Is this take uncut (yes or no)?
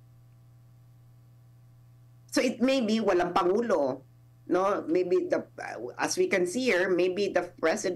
yes